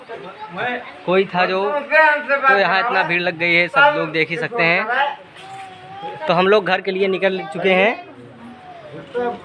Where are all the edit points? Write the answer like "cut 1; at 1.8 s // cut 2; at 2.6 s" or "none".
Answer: none

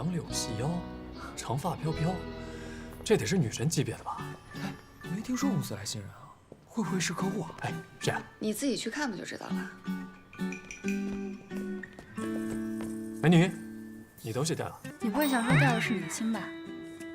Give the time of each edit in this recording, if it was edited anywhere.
cut 1; at 14.9 s

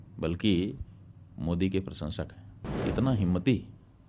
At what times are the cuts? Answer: cut 1; at 2.8 s

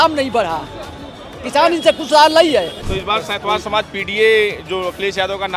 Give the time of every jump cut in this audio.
cut 1; at 2.8 s

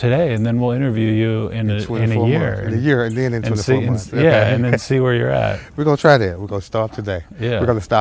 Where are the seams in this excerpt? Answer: none

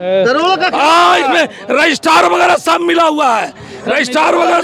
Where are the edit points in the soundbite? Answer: none

